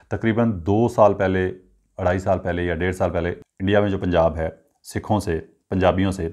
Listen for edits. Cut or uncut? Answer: cut